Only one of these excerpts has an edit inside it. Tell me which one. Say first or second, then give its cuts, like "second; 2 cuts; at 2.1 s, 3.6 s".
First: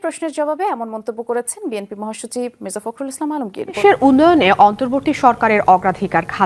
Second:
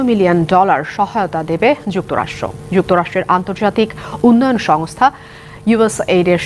first; 1 cut; at 3.8 s